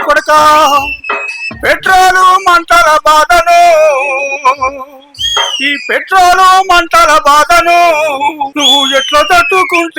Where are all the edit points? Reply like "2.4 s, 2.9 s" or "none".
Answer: 8.5 s